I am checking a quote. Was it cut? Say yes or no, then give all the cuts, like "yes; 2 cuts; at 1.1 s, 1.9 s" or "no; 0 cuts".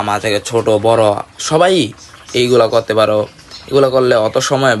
no; 0 cuts